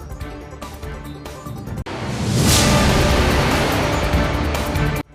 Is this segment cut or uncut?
cut